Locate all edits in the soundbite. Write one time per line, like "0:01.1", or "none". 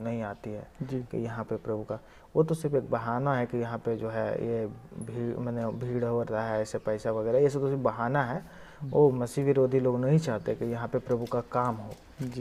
none